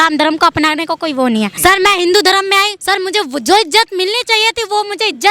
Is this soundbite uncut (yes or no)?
no